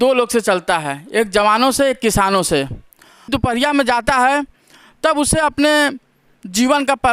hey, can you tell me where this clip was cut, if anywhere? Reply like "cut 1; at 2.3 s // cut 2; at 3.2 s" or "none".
cut 1; at 3.3 s